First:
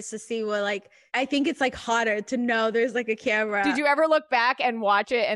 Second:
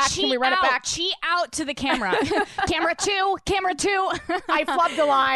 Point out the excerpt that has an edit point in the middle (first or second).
first